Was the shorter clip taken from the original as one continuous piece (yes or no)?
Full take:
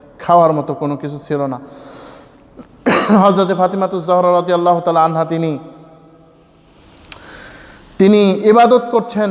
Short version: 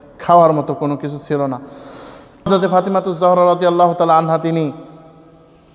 no